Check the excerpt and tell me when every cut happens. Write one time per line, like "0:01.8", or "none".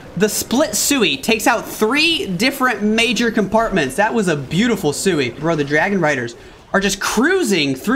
0:05.4